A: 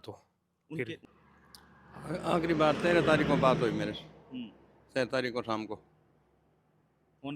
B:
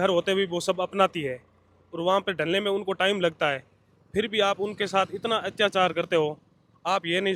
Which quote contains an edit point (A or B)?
A